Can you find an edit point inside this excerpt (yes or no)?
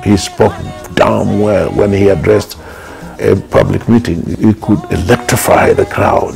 no